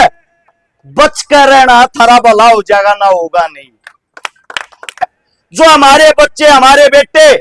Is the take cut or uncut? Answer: cut